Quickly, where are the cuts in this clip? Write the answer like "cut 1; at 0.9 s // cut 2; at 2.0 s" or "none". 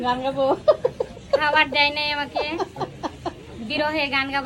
none